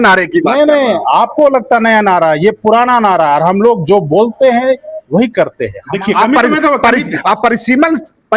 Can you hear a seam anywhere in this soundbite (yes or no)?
yes